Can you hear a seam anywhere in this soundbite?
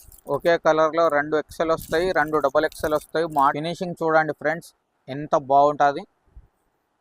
yes; 1 cut; at 3.6 s

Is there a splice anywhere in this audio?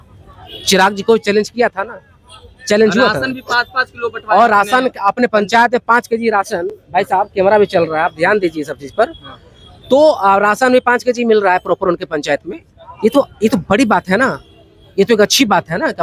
no; 0 cuts

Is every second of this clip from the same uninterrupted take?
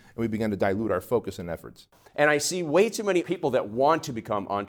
no; 2 cuts; at 1.8 s, 3.2 s

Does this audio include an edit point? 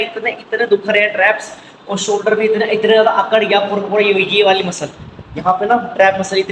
no; 0 cuts

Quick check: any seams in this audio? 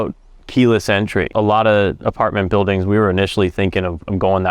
yes; 1 cut; at 1.3 s

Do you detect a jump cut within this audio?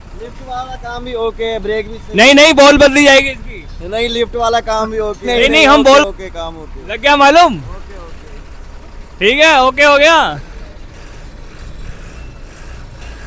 yes; 1 cut; at 6.0 s

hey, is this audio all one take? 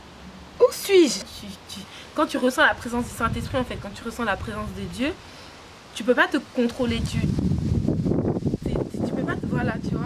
no; 1 cut; at 1.2 s

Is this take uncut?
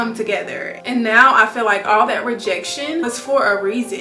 no; 1 cut; at 3.1 s

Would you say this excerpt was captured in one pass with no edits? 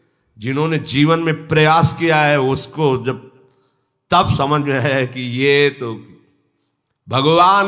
yes; 0 cuts

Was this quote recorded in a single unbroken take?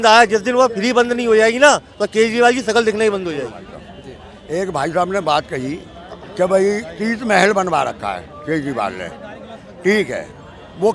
yes; 0 cuts

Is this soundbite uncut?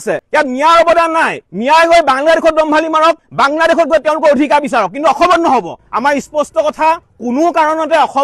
no; 2 cuts; at 5.8 s, 7.0 s

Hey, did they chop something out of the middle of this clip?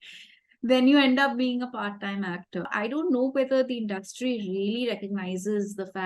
yes; 1 cut; at 2.7 s

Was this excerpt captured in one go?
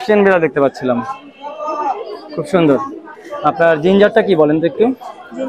yes; 0 cuts

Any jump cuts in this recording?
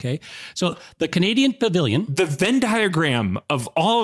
yes; 1 cut; at 2.1 s

